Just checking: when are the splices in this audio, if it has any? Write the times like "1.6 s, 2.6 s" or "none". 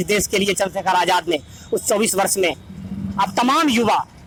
none